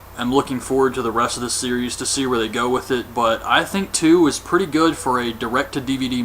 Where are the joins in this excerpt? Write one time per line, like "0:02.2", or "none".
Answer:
0:04.9